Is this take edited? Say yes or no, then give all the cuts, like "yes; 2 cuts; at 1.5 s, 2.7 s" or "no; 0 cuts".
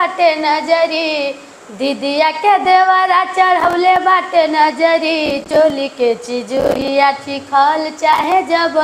no; 0 cuts